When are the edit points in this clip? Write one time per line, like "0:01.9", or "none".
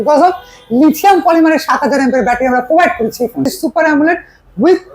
0:03.5